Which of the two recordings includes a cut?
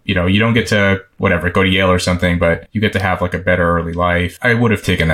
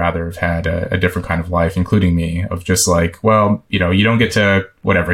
first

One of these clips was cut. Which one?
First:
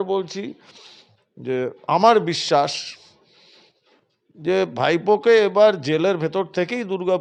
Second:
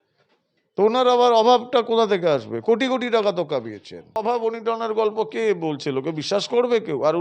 second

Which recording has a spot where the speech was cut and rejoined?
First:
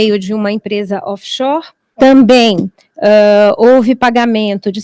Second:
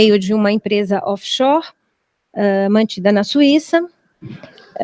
first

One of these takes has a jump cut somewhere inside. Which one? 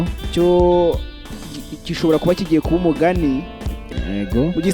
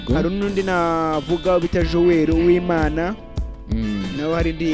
first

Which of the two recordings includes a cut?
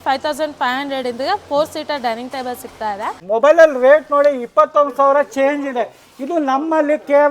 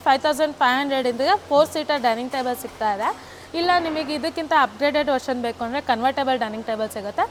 first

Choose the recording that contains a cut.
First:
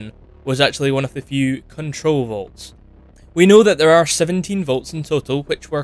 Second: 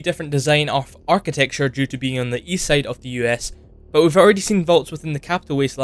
first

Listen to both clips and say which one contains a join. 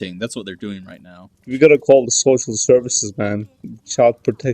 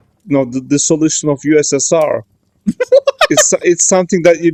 first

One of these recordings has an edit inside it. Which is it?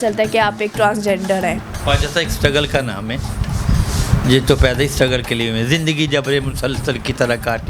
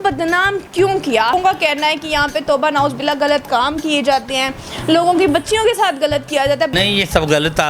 second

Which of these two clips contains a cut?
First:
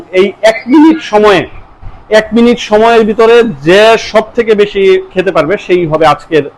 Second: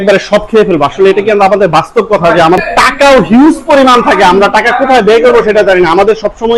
second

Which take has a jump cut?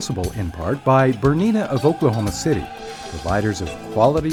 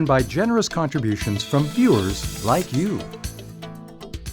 second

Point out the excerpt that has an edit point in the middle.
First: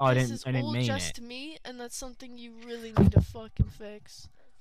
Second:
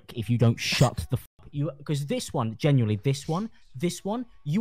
second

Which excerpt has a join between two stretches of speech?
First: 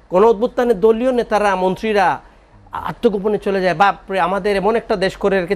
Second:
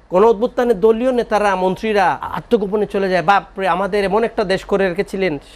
second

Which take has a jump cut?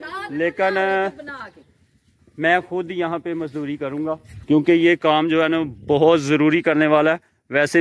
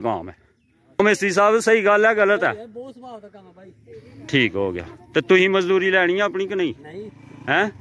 second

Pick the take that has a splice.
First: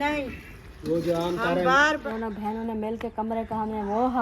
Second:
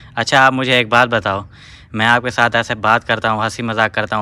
first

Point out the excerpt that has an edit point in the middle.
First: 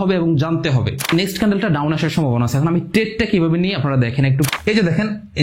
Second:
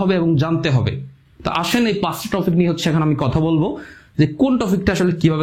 first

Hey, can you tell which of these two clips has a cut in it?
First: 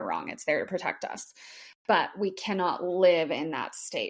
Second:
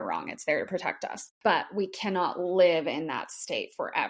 second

